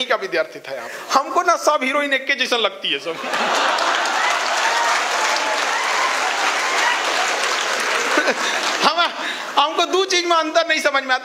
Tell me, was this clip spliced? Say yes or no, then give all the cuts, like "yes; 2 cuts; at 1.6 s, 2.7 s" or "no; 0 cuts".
yes; 1 cut; at 0.9 s